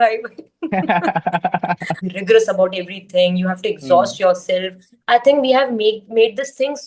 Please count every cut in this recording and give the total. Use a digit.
1